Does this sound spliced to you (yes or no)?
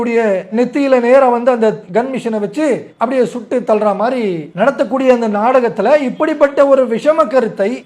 yes